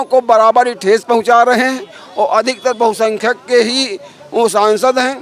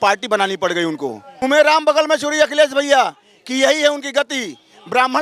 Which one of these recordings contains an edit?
second; 1 cut; at 1.4 s

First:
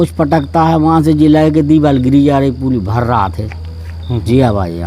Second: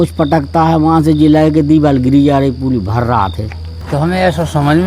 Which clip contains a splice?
second; 1 cut; at 3.8 s

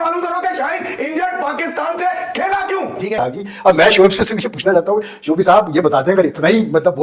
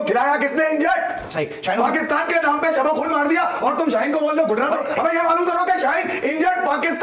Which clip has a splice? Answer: first; 1 cut; at 3.1 s

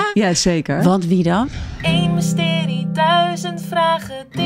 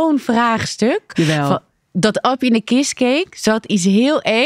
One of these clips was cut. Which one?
first; 1 cut; at 1.5 s

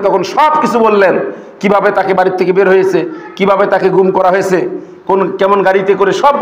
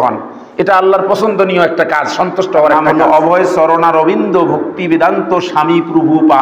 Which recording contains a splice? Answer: second; 1 cut; at 2.8 s

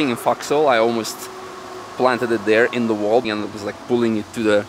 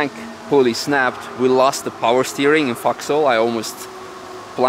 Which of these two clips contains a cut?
first; 1 cut; at 3.3 s

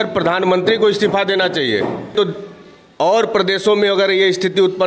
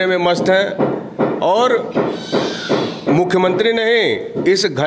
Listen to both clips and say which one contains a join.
first; 1 cut; at 2.1 s

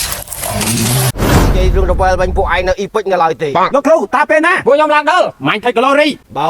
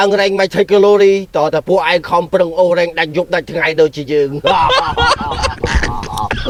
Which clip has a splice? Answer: first; 1 cut; at 1.5 s

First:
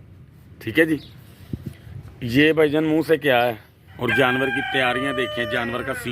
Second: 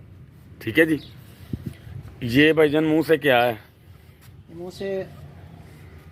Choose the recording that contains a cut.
first; 1 cut; at 3.9 s

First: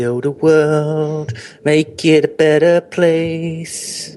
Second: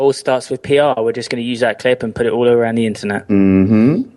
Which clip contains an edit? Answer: second; 1 cut; at 3.2 s

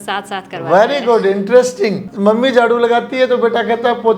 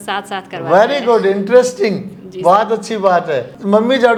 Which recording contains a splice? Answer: first; 1 cut; at 2.1 s

